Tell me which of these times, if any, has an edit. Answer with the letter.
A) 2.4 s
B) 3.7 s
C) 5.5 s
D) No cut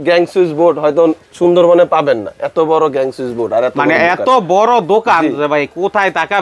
D